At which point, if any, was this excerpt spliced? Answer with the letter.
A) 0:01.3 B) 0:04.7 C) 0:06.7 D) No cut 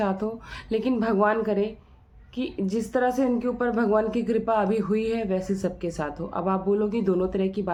D